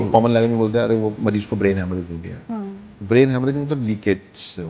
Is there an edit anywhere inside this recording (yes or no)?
no